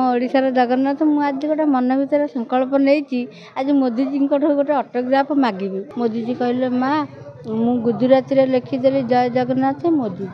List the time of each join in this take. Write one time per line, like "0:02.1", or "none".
0:05.8